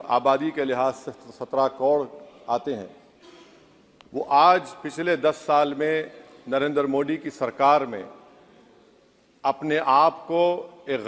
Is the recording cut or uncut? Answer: uncut